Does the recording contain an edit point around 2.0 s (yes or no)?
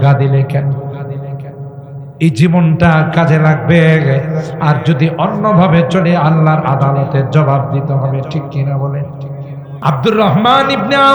no